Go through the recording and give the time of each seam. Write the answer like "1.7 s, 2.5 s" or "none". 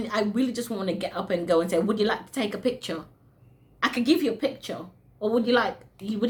none